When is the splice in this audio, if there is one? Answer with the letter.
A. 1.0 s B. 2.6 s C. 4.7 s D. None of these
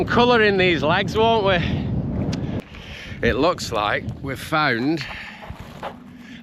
B